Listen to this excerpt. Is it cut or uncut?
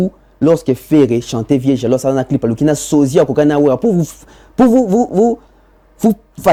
uncut